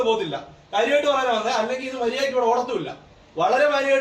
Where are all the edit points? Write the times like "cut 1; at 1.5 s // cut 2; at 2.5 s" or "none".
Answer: none